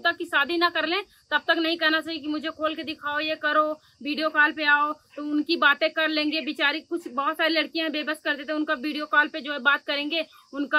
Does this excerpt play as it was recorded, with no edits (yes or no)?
yes